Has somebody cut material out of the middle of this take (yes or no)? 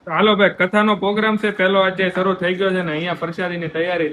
no